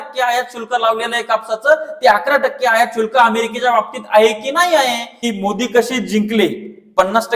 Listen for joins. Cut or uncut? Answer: cut